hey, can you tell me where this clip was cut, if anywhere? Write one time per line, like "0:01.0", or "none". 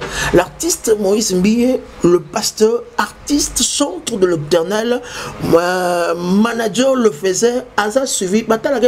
none